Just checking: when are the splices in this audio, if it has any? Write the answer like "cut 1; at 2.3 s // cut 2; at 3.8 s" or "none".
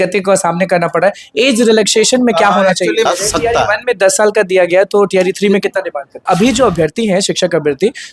cut 1; at 3.1 s // cut 2; at 6.2 s